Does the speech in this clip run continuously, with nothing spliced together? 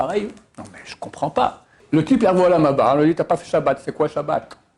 no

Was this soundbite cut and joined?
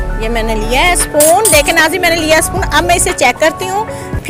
no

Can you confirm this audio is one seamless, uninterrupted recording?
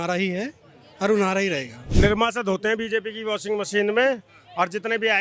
yes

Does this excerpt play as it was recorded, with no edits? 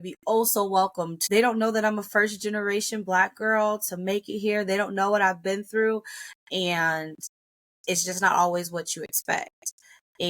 no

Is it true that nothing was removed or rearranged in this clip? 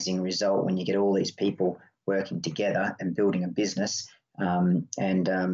yes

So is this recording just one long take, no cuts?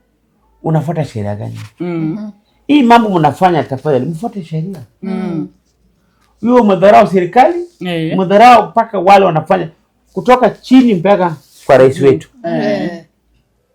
yes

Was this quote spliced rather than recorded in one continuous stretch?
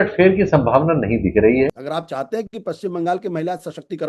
yes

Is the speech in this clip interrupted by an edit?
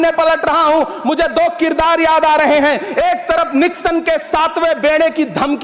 no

